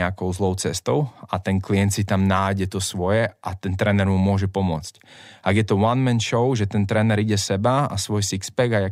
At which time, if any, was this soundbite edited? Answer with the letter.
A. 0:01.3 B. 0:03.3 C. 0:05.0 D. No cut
D